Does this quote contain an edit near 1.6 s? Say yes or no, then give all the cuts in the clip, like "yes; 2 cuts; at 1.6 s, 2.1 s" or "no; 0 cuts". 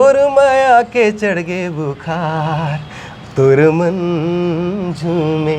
no; 0 cuts